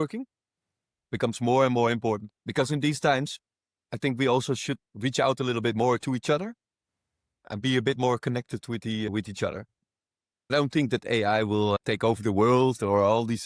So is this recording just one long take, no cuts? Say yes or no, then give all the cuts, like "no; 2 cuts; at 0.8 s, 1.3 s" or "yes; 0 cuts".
yes; 0 cuts